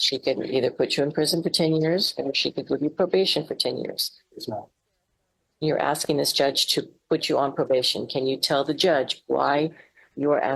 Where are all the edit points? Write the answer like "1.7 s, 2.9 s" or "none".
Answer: none